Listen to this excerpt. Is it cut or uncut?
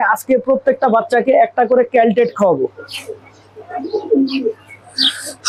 cut